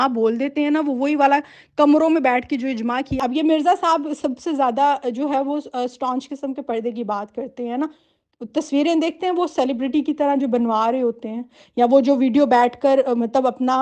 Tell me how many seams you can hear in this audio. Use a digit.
1